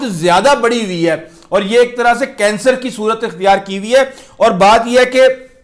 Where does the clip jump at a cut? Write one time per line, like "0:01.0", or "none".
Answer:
none